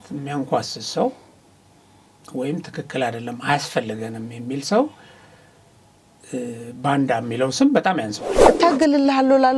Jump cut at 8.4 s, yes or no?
yes